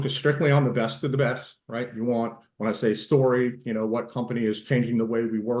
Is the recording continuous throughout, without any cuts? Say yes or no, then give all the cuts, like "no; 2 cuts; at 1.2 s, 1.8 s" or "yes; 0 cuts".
yes; 0 cuts